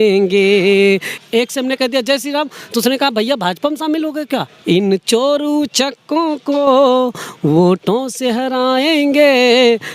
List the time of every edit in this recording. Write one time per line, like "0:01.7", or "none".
0:01.1
0:04.5